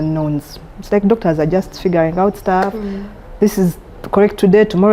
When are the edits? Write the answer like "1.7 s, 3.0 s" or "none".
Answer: none